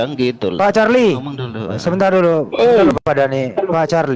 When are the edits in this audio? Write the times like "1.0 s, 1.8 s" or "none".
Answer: none